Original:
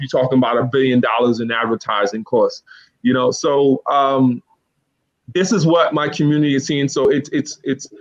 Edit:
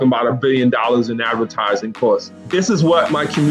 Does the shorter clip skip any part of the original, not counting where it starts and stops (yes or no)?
yes